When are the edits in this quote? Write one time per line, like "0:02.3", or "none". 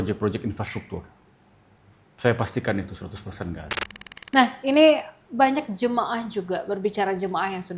0:04.1